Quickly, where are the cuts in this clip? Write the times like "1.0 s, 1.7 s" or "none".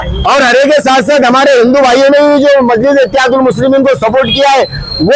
none